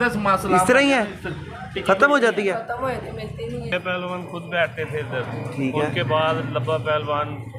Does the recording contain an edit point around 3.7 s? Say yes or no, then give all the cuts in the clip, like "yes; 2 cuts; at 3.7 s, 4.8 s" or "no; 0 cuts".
yes; 1 cut; at 3.7 s